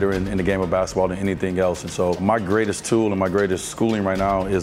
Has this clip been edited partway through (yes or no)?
yes